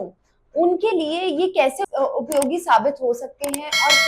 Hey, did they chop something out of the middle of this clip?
yes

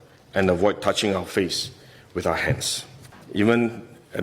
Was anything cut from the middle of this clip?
yes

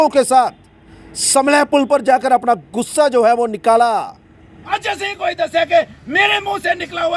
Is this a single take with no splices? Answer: no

